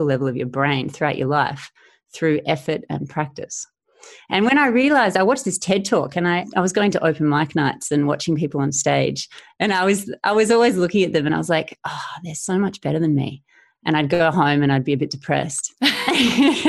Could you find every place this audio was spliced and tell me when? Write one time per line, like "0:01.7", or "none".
none